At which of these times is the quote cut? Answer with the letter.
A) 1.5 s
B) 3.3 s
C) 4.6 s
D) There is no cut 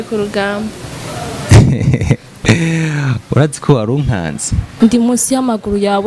C